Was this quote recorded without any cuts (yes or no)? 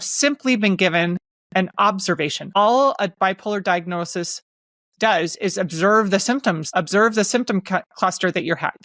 no